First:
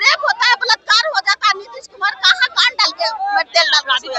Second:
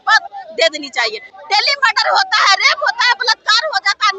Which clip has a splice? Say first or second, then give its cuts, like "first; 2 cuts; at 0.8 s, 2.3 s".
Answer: second; 1 cut; at 1.2 s